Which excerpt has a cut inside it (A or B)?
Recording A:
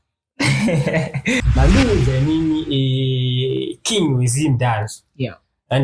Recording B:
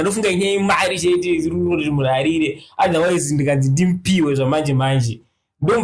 A